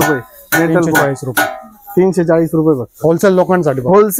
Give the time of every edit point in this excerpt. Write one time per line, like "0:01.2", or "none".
none